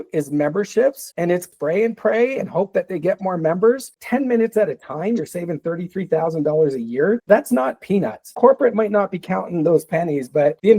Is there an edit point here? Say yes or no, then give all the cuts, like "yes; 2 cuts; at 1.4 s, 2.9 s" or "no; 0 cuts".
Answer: yes; 3 cuts; at 1.5 s, 4.0 s, 8.3 s